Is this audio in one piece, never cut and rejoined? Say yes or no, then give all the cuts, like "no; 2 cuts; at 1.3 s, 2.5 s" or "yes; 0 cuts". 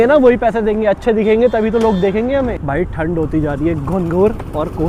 yes; 0 cuts